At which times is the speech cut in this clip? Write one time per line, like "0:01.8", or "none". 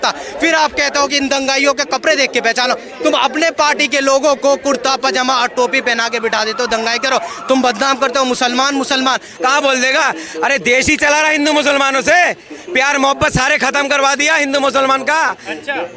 0:09.3